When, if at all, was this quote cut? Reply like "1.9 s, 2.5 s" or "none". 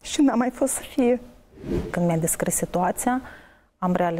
1.9 s